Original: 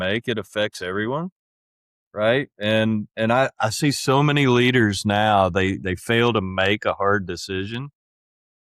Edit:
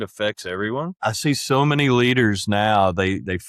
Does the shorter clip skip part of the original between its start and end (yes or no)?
yes